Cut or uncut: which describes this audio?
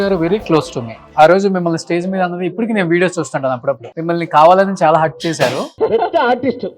cut